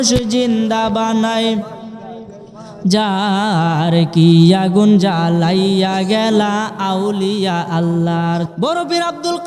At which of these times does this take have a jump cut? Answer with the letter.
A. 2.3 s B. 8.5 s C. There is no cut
B